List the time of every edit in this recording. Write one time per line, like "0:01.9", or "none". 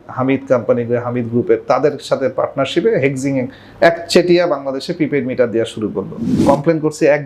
0:06.3